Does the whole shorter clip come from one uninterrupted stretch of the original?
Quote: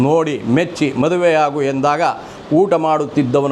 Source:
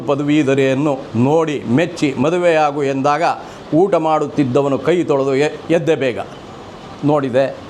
yes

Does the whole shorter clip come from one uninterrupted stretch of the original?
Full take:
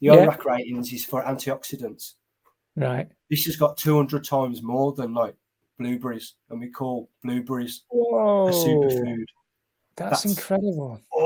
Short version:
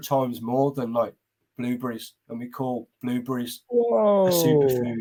yes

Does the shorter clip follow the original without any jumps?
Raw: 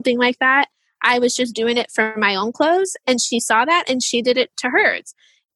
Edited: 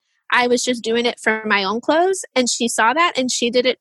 yes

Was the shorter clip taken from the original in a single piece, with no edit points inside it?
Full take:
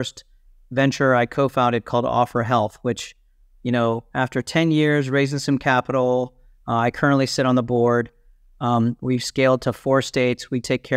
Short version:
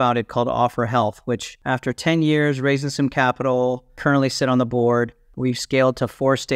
no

